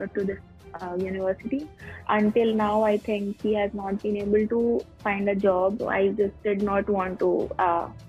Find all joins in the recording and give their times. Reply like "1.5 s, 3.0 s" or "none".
1.9 s, 5.8 s